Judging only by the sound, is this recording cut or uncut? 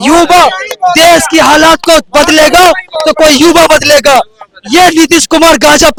uncut